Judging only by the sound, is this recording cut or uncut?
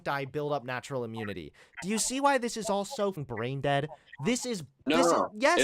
cut